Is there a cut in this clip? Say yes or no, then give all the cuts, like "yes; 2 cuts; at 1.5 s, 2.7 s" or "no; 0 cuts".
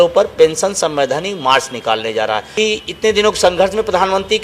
yes; 1 cut; at 2.5 s